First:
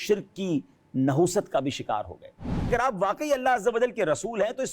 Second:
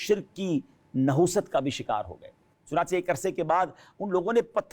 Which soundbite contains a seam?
first; 1 cut; at 2.7 s

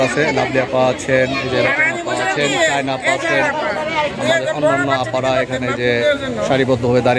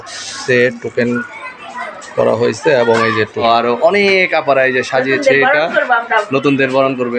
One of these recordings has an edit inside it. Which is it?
second; 1 cut; at 3.4 s

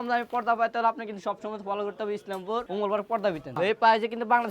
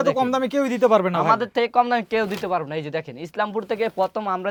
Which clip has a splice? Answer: first; 2 cuts; at 2.7 s, 3.5 s

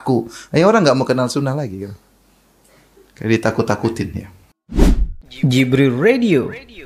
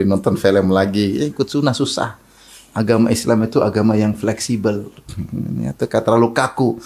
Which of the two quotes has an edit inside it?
first; 1 cut; at 4.7 s

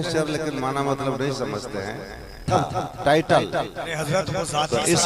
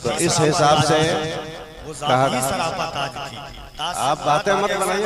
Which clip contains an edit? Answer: first; 1 cut; at 2.5 s

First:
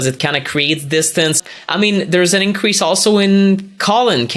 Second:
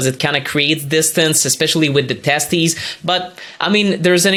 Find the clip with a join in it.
first; 1 cut; at 1.5 s

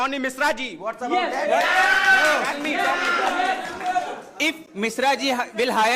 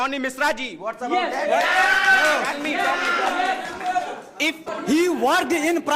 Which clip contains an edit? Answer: second; 1 cut; at 4.7 s

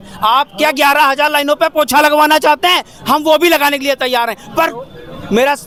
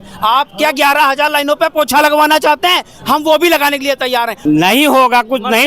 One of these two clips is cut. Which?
second; 1 cut; at 4.3 s

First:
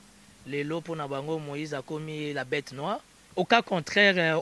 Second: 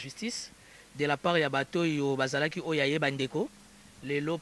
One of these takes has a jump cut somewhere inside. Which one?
first; 1 cut; at 3.2 s

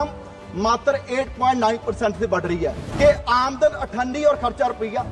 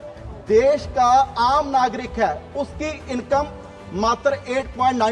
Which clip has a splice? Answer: first; 1 cut; at 2.8 s

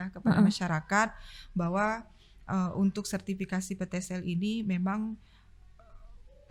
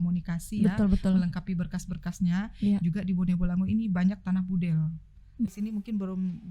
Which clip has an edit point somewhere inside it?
second; 1 cut; at 5.5 s

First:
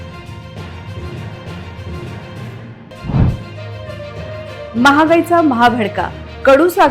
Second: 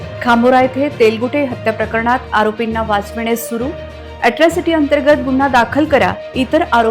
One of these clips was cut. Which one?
first; 2 cuts; at 1.2 s, 2.8 s

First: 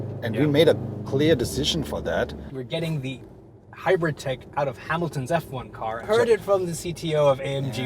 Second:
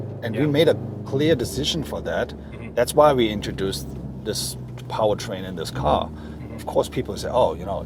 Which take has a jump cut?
first; 2 cuts; at 2.5 s, 6.1 s

